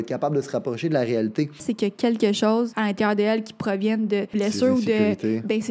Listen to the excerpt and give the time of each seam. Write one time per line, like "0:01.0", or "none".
0:01.6
0:02.7
0:04.3